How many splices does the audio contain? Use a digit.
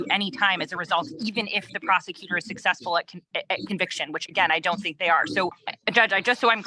1